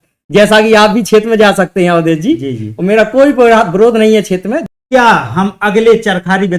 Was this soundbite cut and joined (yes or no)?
yes